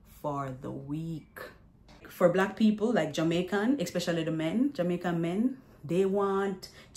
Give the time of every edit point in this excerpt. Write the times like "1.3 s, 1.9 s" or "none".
2.1 s